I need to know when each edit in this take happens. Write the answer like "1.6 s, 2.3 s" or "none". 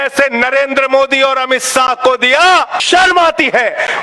2.8 s